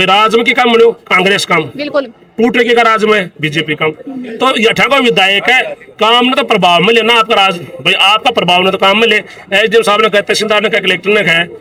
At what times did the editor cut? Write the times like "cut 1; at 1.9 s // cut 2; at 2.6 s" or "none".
none